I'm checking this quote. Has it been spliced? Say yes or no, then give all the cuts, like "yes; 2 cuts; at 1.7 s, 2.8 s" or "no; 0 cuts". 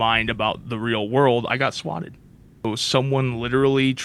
yes; 1 cut; at 2.6 s